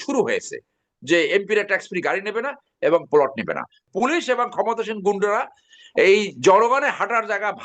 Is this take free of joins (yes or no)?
no